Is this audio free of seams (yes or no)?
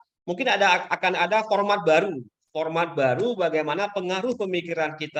yes